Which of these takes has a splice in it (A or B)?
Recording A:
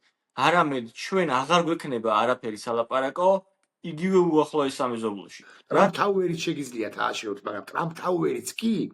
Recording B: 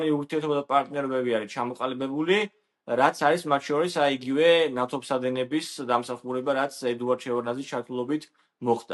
A